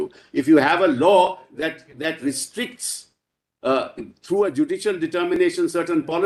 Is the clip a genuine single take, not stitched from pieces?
yes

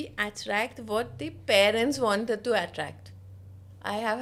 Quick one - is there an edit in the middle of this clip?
no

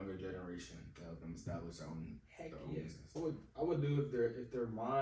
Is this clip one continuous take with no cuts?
no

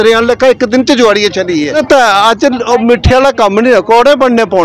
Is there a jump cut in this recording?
yes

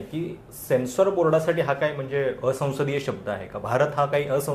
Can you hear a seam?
no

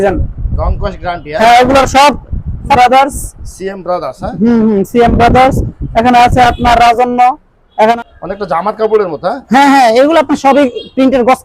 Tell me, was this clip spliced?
yes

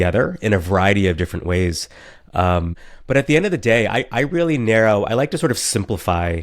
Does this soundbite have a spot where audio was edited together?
yes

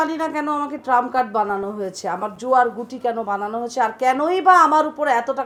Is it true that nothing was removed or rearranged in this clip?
yes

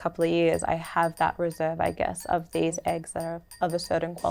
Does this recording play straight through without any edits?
yes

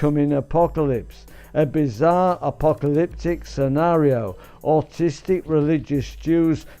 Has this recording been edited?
yes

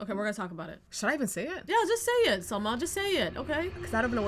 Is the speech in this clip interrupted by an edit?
no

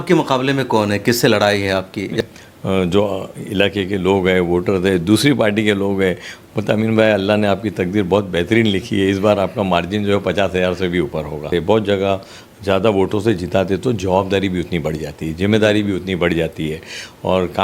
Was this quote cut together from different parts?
yes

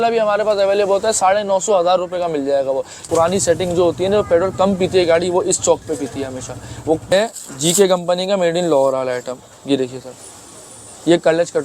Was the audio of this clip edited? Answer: yes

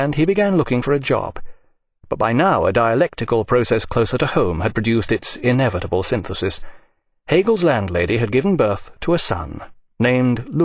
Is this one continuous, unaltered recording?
no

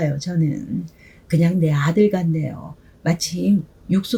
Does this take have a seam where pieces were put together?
no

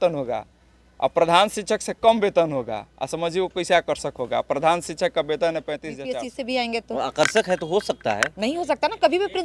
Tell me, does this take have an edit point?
yes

